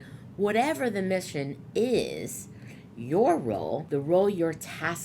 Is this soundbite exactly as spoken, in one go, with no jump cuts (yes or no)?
no